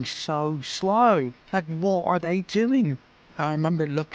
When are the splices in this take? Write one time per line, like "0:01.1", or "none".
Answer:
0:01.4